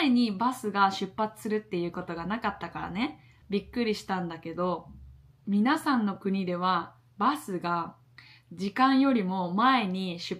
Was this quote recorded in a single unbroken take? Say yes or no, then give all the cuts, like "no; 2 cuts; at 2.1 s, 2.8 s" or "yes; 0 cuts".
yes; 0 cuts